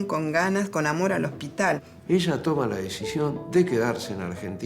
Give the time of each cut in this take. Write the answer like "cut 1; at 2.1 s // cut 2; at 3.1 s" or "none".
cut 1; at 1.9 s